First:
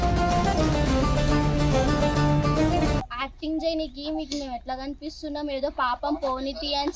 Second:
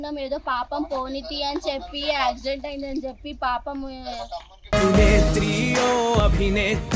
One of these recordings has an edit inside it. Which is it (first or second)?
first